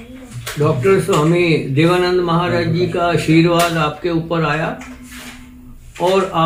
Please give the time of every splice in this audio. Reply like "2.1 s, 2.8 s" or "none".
none